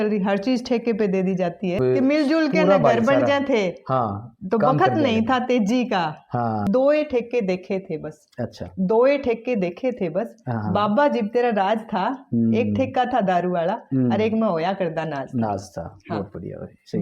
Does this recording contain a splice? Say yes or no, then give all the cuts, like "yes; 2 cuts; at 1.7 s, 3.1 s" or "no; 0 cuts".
yes; 2 cuts; at 1.8 s, 6.7 s